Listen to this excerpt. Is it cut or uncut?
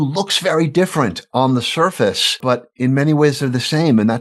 cut